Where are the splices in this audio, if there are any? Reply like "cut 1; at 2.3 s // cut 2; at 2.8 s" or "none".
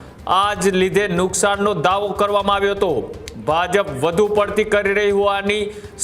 none